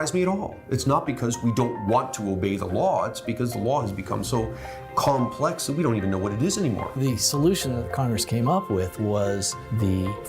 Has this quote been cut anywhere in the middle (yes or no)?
yes